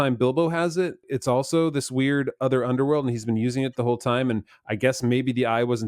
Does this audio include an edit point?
yes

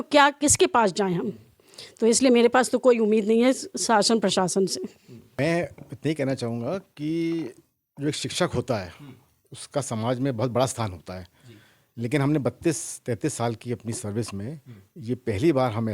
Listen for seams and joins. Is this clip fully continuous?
no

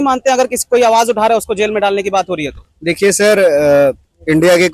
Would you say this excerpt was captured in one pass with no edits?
yes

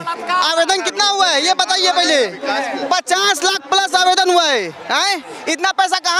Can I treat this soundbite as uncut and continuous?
yes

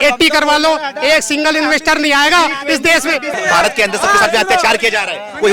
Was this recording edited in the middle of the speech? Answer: yes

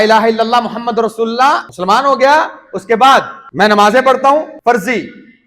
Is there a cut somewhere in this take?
yes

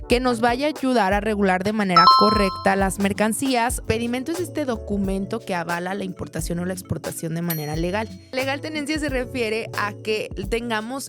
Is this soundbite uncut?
no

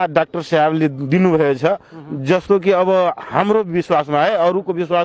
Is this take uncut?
yes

